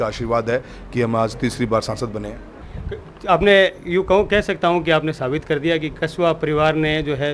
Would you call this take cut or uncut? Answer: uncut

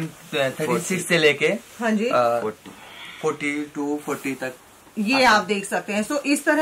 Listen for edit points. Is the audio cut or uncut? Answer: uncut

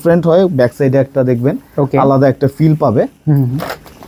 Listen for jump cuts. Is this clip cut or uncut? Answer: uncut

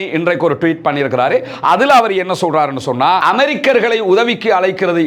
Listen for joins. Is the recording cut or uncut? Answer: uncut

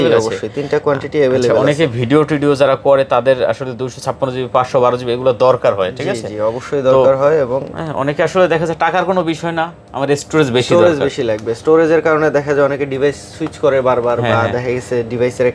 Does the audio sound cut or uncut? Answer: uncut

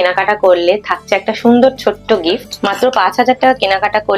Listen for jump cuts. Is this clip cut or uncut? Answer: cut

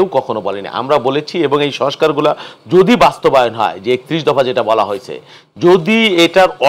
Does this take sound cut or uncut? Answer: uncut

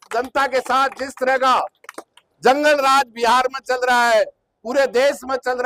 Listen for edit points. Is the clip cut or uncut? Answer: uncut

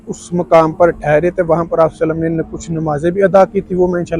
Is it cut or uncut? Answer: uncut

